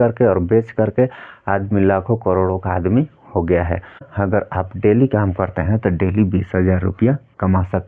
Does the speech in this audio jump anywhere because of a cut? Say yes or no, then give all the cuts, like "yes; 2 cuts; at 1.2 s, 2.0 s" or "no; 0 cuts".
yes; 1 cut; at 4.1 s